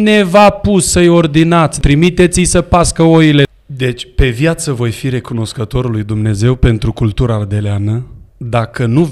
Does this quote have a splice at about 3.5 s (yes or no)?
yes